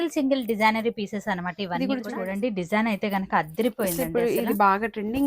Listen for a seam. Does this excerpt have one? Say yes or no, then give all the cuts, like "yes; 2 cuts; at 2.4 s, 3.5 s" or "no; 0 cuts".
yes; 1 cut; at 2.1 s